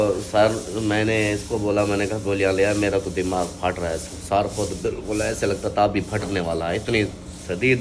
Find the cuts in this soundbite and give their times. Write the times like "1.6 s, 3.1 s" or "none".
none